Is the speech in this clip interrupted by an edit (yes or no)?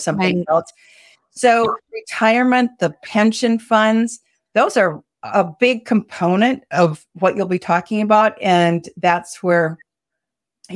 yes